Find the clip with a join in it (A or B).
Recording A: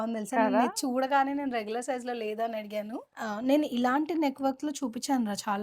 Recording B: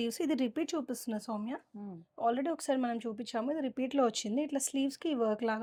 A